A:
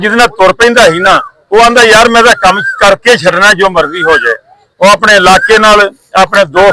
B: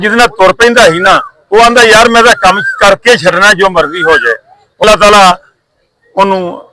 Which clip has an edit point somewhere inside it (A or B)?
B